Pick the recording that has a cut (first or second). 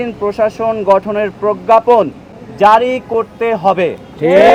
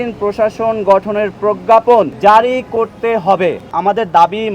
second